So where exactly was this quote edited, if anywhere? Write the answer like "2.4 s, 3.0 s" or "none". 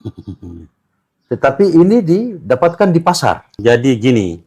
3.5 s